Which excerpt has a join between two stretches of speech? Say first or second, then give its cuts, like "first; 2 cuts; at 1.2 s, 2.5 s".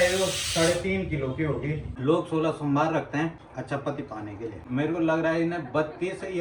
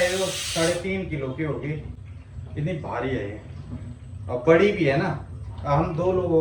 first; 3 cuts; at 1.8 s, 3.4 s, 4.6 s